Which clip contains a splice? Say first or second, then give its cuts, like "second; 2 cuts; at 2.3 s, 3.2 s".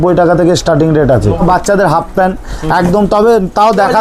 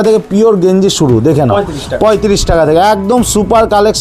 first; 1 cut; at 1.4 s